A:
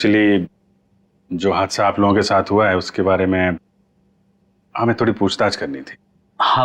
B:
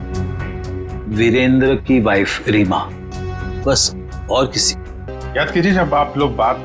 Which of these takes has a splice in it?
B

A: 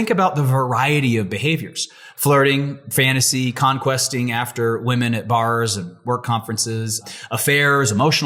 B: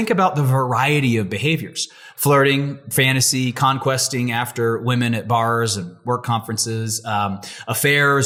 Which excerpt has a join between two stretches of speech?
A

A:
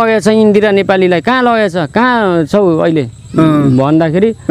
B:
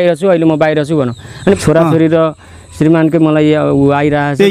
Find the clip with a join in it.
B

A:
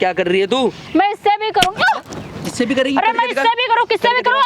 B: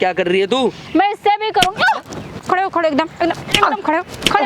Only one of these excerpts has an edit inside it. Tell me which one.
B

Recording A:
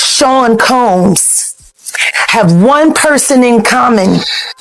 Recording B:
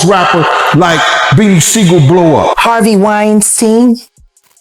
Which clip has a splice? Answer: B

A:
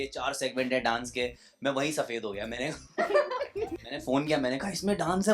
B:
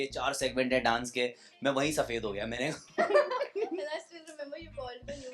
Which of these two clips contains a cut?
A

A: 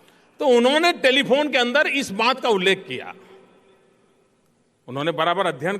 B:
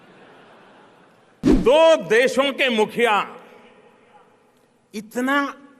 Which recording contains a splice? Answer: B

